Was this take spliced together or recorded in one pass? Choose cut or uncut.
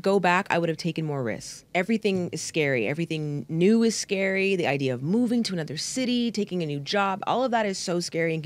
cut